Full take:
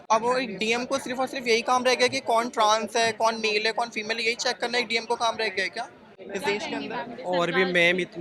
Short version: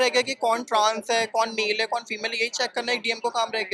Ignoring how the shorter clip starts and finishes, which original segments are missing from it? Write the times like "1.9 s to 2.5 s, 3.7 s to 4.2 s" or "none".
none